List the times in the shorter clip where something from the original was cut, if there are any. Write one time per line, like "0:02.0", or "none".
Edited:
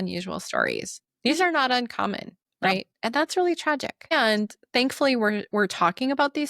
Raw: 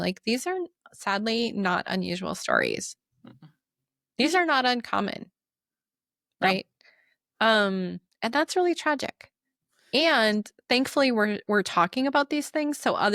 0:01.0
0:02.9
0:04.1